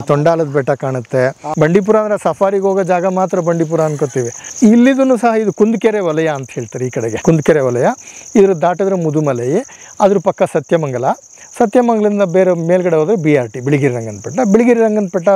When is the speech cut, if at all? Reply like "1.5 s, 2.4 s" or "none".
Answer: 1.4 s, 4.4 s, 7.2 s